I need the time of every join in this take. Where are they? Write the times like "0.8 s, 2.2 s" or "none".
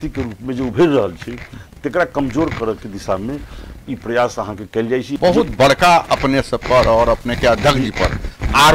5.1 s